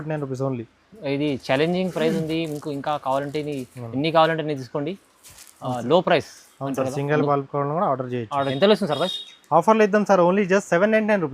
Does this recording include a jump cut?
yes; 1 cut; at 8.4 s

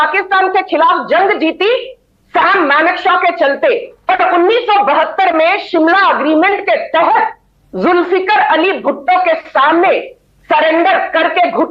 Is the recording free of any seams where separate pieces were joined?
yes; 0 cuts

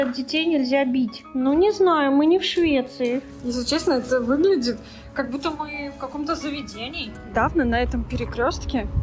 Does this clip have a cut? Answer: yes; 3 cuts; at 1.2 s, 3.3 s, 7.3 s

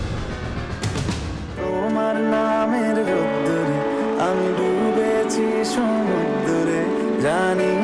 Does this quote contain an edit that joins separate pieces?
yes; 1 cut; at 1.6 s

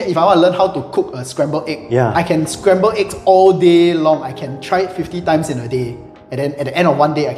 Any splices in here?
no; 0 cuts

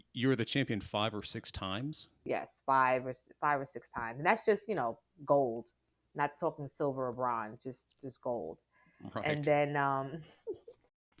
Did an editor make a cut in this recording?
yes; 1 cut; at 2.2 s

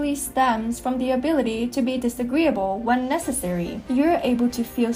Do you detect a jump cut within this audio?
yes; 1 cut; at 3.8 s

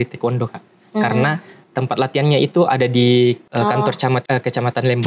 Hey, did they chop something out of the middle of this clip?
yes; 2 cuts; at 3.4 s, 4.2 s

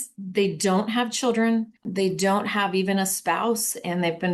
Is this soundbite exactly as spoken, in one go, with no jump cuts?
no; 1 cut; at 1.8 s

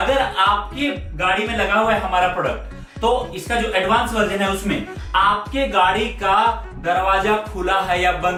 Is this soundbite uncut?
yes; 0 cuts

